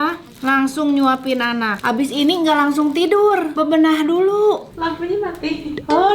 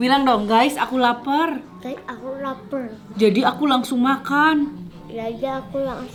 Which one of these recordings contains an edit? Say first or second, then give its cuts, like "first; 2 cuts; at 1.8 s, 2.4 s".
first; 3 cuts; at 1.7 s, 3.5 s, 4.7 s